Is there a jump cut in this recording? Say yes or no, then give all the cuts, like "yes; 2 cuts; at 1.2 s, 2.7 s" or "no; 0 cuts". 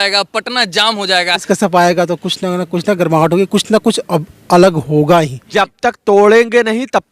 yes; 2 cuts; at 1.4 s, 5.4 s